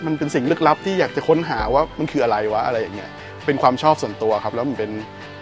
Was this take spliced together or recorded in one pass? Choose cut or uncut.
uncut